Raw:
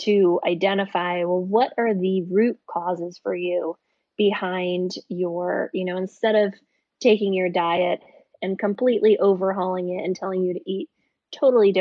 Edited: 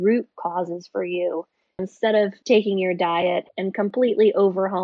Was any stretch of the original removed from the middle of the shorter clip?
yes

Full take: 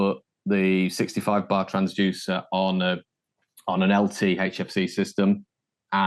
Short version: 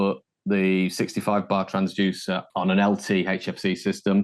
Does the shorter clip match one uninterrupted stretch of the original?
no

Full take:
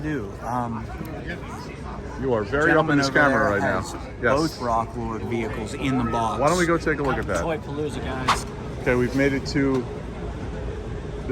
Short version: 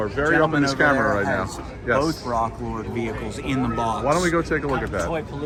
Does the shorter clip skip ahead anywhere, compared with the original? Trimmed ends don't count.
no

